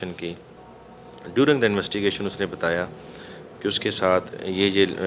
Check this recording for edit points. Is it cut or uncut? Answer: uncut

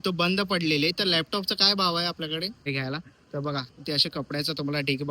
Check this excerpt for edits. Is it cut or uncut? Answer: cut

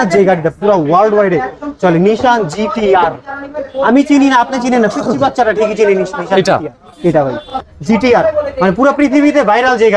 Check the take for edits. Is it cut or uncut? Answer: cut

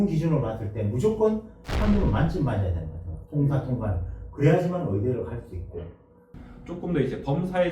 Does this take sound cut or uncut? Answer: cut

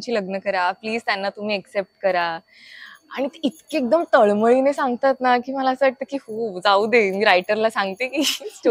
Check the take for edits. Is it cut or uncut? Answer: uncut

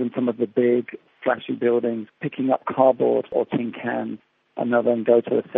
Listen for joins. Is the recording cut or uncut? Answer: cut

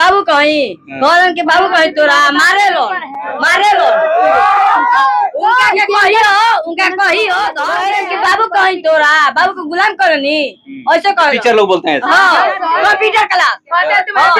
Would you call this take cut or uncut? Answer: cut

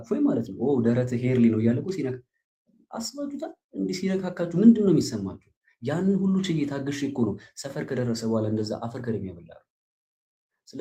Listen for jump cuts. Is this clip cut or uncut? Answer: uncut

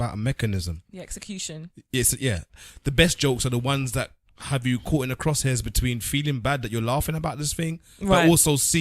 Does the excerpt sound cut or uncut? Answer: cut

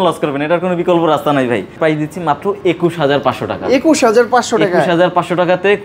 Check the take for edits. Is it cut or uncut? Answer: cut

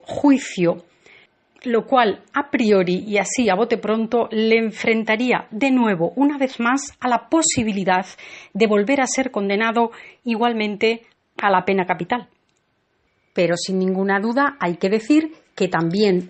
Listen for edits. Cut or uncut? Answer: uncut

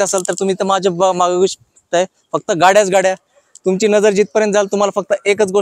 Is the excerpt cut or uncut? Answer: uncut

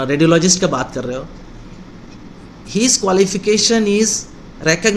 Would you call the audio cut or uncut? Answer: uncut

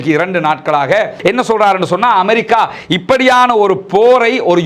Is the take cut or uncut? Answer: cut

